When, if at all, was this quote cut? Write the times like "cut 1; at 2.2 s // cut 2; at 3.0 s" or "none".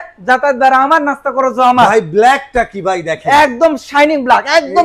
none